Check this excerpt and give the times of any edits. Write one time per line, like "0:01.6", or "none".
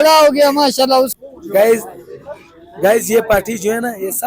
0:01.1